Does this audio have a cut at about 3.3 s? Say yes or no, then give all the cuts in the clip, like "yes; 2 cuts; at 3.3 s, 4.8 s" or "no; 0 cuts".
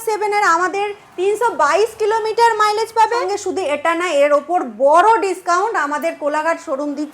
yes; 1 cut; at 3.3 s